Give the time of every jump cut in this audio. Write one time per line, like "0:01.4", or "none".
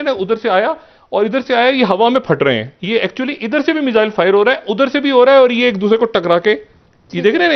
none